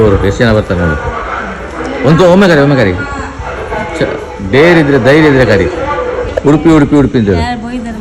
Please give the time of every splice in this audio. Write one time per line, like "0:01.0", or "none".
none